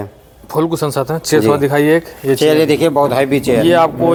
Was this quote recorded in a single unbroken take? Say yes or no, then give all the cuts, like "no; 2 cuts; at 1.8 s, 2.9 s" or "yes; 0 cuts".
yes; 0 cuts